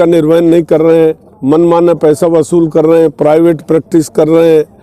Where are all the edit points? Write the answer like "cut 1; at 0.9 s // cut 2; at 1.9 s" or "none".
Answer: none

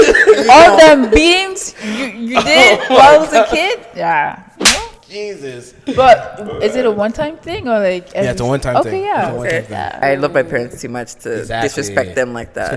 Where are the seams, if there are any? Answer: cut 1; at 10.0 s

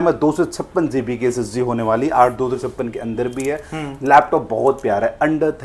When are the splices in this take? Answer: none

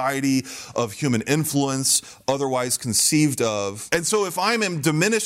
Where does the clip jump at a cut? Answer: cut 1; at 3.8 s

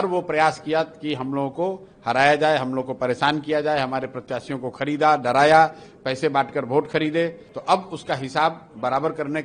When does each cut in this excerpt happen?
cut 1; at 7.5 s

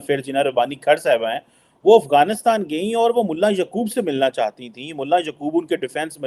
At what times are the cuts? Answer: none

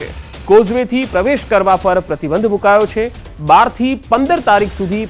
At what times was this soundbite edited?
none

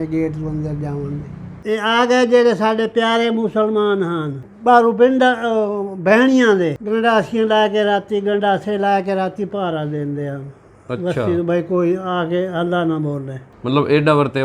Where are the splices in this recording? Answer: cut 1; at 1.5 s

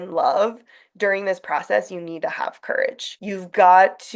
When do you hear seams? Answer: cut 1; at 3.1 s

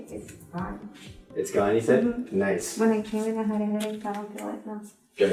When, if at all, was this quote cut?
none

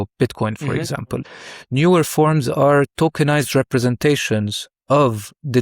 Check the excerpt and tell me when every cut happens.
cut 1; at 1.3 s

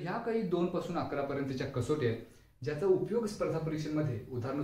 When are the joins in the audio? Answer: none

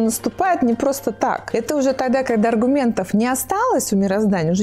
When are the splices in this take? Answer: cut 1; at 1.4 s

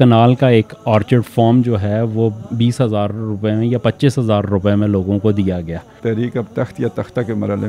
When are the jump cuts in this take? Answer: cut 1; at 6.0 s

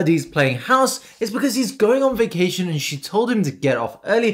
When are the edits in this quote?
none

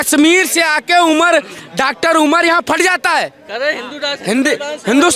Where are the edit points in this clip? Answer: none

